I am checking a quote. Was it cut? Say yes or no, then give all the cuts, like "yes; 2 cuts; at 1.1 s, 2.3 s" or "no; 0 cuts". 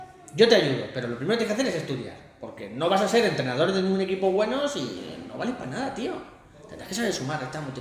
no; 0 cuts